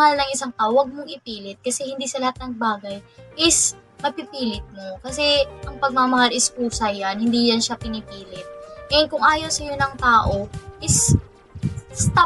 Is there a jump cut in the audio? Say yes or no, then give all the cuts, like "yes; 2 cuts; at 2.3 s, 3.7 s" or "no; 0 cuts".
no; 0 cuts